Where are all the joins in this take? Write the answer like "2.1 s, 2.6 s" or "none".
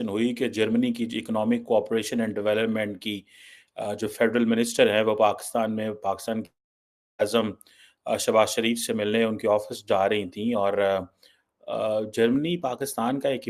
none